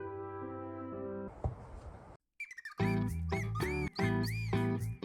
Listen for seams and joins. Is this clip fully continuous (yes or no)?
no